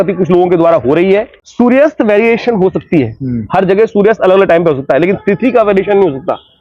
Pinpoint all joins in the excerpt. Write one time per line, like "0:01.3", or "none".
0:01.4